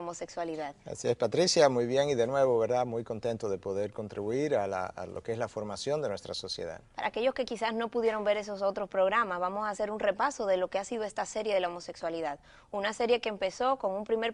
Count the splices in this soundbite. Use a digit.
1